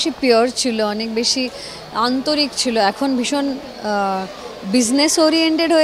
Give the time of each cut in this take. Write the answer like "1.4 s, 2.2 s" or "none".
none